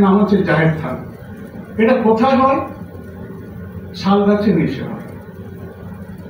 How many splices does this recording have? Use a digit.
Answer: 0